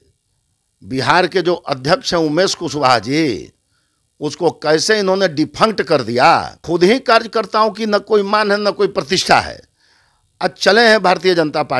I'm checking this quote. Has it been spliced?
yes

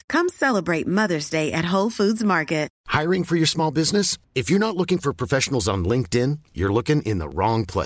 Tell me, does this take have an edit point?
yes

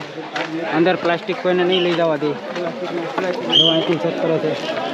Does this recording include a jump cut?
no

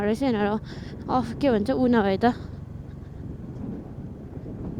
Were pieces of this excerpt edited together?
no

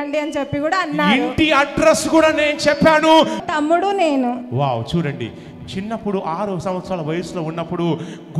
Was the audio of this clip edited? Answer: yes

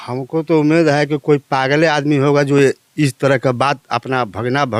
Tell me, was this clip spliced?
no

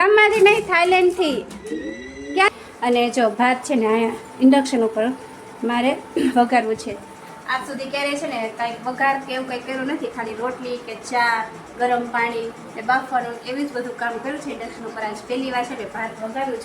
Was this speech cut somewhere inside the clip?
yes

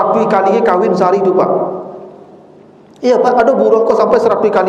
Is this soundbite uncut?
yes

